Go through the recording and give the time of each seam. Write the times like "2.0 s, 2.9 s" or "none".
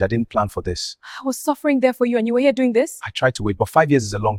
none